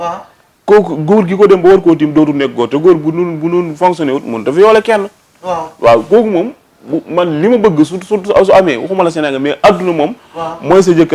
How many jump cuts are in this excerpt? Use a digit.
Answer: 0